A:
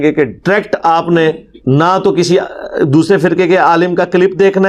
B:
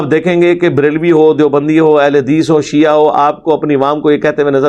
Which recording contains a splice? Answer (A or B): A